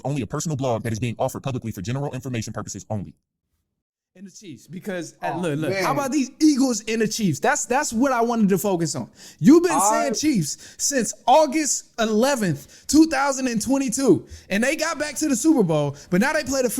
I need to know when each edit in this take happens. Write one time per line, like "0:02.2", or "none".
0:03.7